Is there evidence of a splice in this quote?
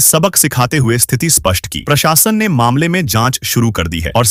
no; 0 cuts

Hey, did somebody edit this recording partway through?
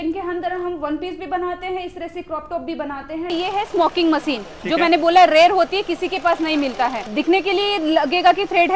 yes; 2 cuts; at 3.3 s, 7.1 s

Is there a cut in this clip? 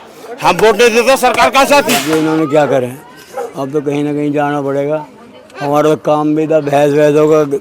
yes; 1 cut; at 2.0 s

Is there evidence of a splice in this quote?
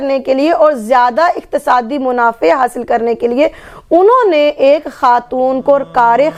no; 0 cuts

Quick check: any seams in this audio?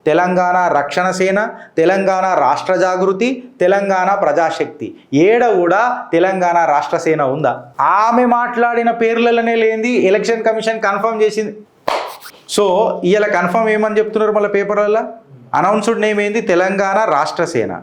no; 0 cuts

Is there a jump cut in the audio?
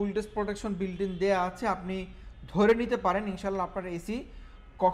no; 0 cuts

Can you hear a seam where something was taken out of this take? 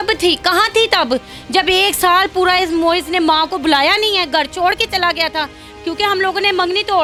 no; 0 cuts

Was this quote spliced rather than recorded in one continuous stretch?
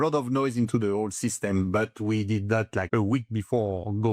yes; 1 cut; at 2.9 s

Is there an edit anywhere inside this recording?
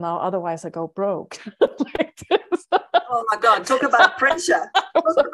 no; 0 cuts

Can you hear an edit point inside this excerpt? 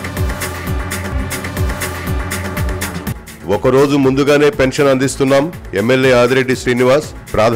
no; 0 cuts

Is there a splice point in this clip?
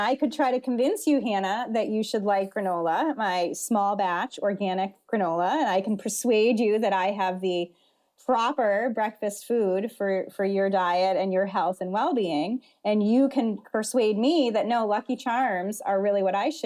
no; 0 cuts

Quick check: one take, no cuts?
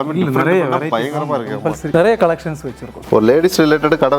no; 2 cuts; at 1.9 s, 2.9 s

